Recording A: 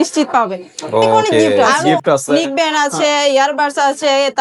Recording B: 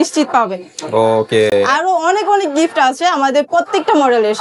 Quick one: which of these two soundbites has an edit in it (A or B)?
A